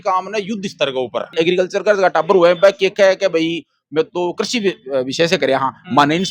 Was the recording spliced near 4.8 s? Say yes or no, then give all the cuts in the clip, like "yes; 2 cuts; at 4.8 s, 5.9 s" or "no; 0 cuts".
no; 1 cut; at 1.2 s